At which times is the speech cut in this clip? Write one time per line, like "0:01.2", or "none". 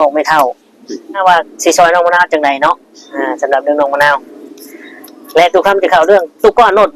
0:01.2